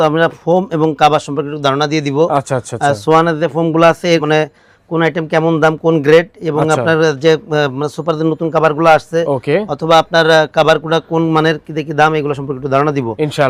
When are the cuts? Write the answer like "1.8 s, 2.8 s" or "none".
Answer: none